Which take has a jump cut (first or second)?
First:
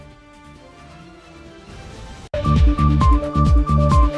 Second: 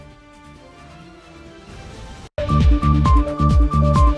first